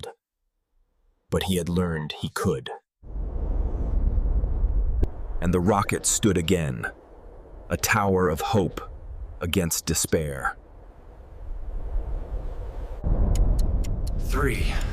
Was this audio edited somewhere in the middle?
yes; 1 cut; at 5.1 s

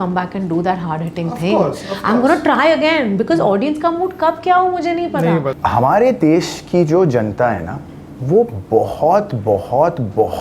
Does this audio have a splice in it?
yes; 1 cut; at 5.6 s

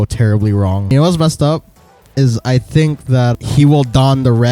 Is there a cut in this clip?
yes; 1 cut; at 0.9 s

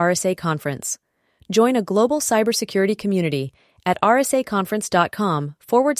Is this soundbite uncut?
yes; 0 cuts

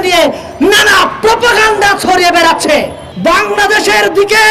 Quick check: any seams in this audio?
yes; 1 cut; at 3.0 s

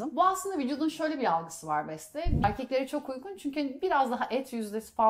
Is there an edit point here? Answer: yes; 1 cut; at 2.4 s

